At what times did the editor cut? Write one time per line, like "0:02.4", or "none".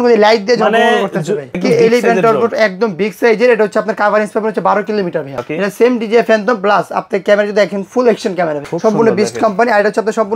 0:01.6
0:05.4
0:08.6